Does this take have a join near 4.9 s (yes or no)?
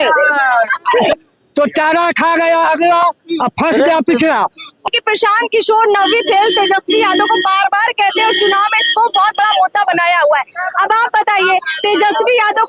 yes